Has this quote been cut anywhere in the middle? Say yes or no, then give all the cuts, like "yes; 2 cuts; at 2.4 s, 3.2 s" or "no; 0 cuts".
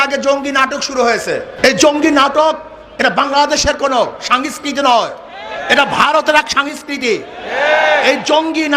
yes; 1 cut; at 1.5 s